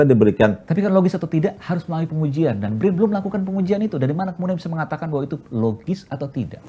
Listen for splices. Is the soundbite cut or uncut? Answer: uncut